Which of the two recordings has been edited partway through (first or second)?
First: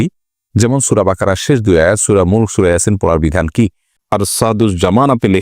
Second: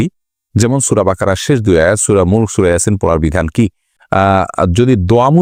first